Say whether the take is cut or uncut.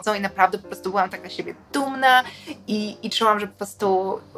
uncut